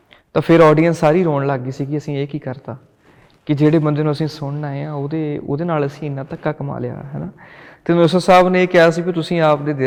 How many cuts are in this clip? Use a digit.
0